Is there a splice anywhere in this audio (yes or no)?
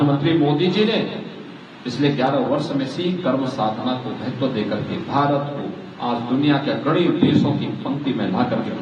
no